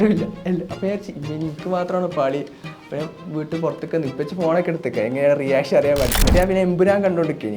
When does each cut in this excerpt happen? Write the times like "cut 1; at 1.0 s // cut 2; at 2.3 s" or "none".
cut 1; at 6.1 s